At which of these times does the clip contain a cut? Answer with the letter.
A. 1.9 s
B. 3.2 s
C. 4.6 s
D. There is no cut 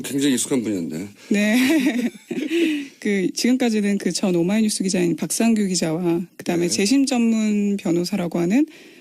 B